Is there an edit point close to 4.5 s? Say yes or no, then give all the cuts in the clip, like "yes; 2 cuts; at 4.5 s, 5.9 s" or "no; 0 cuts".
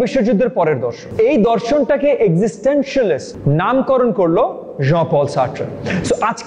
no; 1 cut; at 1.1 s